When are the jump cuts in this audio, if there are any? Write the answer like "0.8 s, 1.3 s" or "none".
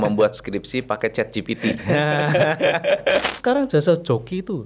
3.2 s